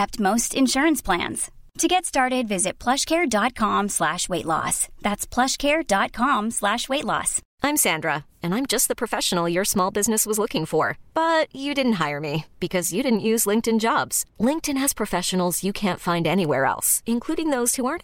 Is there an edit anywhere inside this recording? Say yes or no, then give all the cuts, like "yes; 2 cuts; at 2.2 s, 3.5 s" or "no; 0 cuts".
yes; 1 cut; at 7.4 s